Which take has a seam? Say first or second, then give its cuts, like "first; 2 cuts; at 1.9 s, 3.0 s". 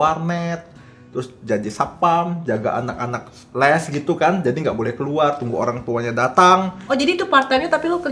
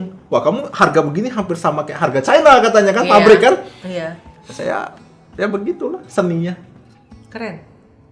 first; 2 cuts; at 3.4 s, 6.8 s